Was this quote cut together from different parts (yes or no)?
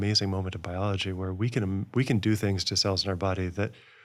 no